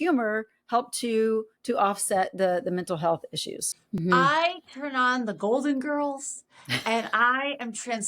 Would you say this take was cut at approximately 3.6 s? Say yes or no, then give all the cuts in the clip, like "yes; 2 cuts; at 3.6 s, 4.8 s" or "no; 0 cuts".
yes; 1 cut; at 3.6 s